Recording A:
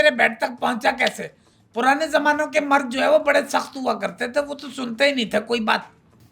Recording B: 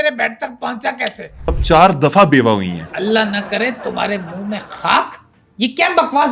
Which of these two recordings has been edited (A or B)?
B